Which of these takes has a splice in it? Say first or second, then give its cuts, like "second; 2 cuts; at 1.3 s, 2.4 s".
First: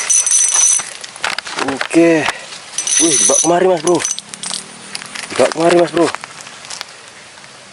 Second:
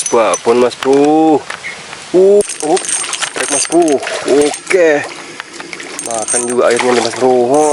second; 1 cut; at 2.4 s